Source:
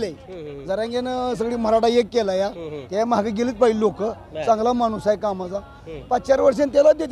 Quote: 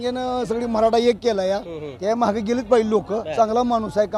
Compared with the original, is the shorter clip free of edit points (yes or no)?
no